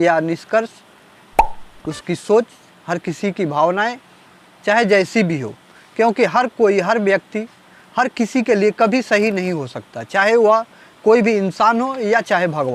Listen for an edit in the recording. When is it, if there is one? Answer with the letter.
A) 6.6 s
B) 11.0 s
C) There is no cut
C